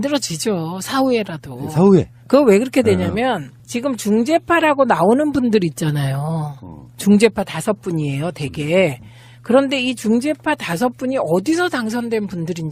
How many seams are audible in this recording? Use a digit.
1